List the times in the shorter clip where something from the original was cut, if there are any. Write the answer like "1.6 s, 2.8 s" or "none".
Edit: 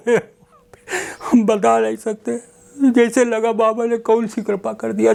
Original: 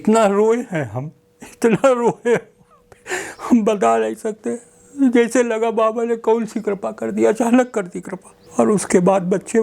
none